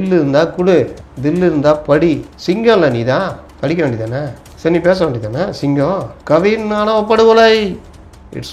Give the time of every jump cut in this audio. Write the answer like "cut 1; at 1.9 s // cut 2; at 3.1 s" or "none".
cut 1; at 1.0 s // cut 2; at 2.3 s // cut 3; at 3.4 s // cut 4; at 4.4 s // cut 5; at 6.1 s